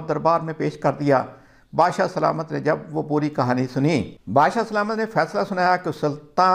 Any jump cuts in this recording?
no; 0 cuts

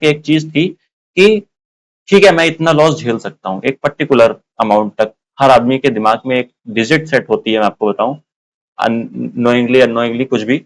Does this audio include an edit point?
no; 0 cuts

